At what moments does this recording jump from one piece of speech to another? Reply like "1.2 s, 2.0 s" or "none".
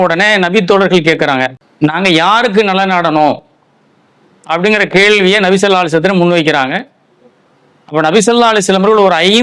1.6 s